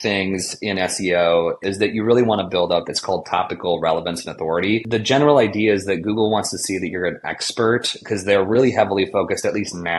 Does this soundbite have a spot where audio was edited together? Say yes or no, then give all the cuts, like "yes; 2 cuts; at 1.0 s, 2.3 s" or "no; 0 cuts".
yes; 2 cuts; at 1.6 s, 4.8 s